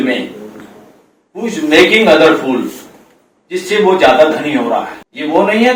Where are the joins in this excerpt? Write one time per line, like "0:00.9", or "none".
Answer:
none